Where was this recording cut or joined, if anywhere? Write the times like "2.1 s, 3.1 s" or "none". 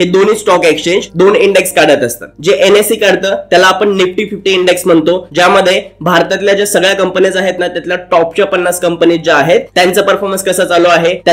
none